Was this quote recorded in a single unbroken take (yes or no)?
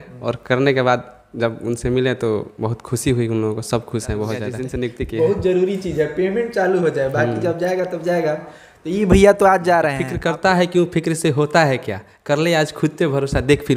no